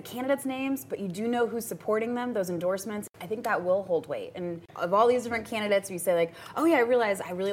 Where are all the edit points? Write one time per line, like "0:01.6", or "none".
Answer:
0:03.1
0:04.7